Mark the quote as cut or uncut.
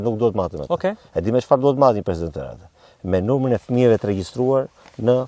uncut